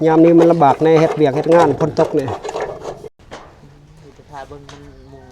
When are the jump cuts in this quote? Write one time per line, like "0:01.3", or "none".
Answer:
0:03.1